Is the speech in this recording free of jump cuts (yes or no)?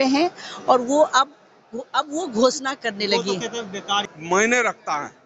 no